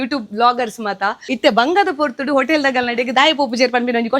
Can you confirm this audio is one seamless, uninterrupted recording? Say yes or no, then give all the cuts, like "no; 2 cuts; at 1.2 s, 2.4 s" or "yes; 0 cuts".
no; 1 cut; at 1.3 s